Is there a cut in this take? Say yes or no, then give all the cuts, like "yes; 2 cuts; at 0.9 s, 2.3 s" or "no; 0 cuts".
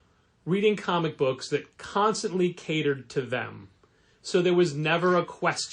no; 0 cuts